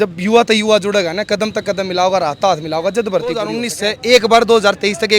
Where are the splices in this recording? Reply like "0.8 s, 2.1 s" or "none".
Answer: 3.6 s